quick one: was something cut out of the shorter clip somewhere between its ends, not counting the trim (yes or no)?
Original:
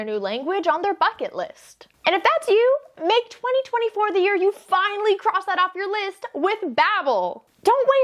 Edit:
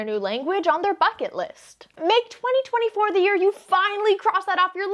yes